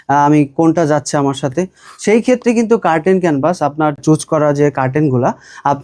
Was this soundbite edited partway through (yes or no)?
yes